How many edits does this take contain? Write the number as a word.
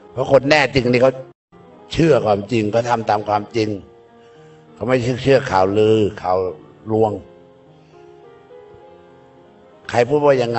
zero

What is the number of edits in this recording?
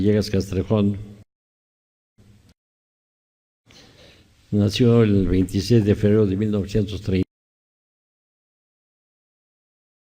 one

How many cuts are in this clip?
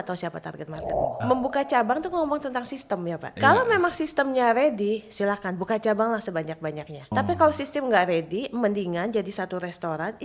three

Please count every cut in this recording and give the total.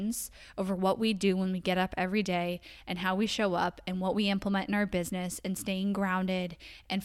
zero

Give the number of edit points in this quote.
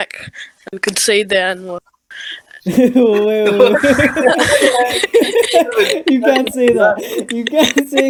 zero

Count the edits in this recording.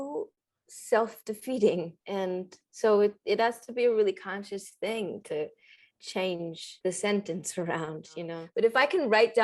two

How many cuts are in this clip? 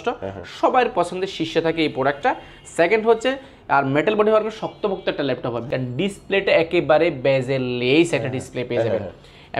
one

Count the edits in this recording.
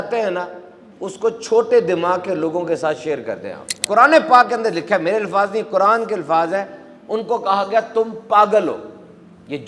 one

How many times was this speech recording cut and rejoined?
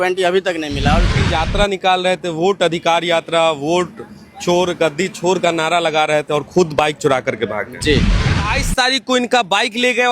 two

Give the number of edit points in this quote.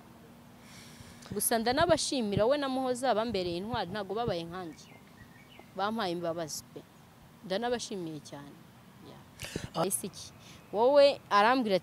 one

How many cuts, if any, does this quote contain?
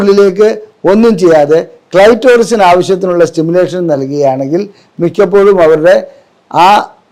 zero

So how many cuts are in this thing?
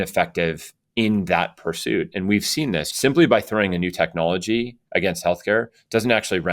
one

